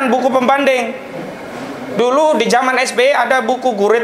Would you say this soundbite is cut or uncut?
uncut